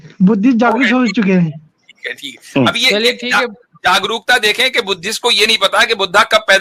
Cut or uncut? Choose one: uncut